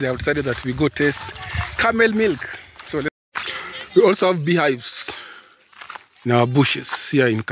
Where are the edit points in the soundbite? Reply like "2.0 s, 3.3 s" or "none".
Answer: 3.1 s